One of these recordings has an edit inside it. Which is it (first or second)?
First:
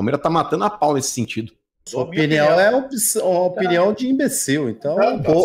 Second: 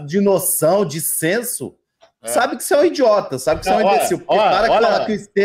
first